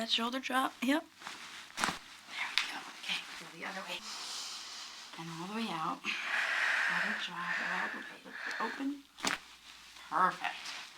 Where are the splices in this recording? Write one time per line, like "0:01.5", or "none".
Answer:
0:04.0